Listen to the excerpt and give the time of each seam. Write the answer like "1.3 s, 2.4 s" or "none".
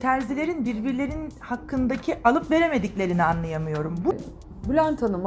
4.1 s